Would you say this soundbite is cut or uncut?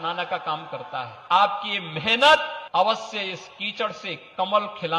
cut